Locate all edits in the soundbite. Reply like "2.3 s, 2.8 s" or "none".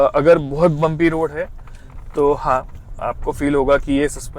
none